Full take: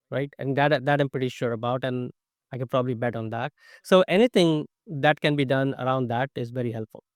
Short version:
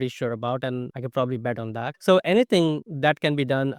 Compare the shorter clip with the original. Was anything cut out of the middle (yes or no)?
yes